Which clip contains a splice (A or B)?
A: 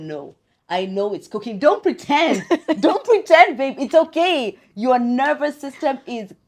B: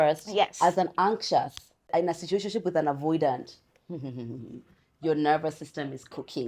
B